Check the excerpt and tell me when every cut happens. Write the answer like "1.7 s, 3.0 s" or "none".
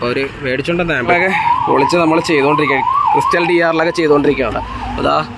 1.1 s